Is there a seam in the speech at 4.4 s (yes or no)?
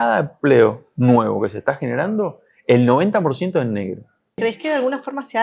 yes